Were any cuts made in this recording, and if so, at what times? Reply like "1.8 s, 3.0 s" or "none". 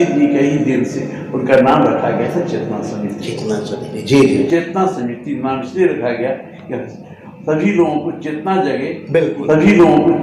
4.5 s, 9.4 s